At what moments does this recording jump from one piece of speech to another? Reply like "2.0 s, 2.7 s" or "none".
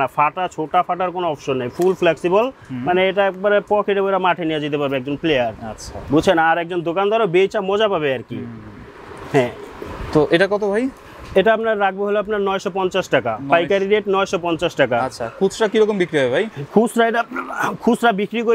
none